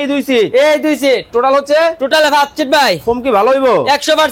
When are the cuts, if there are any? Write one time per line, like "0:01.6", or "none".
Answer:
none